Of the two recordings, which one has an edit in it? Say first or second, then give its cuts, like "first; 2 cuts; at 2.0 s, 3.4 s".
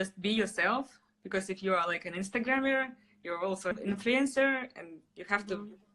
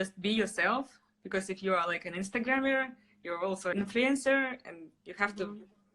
second; 1 cut; at 3.7 s